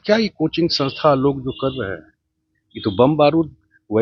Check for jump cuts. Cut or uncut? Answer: uncut